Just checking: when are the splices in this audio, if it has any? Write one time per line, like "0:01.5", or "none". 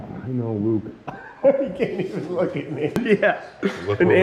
0:03.0